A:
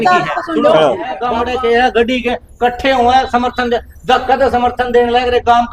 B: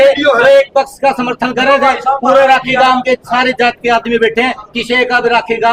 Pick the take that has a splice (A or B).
A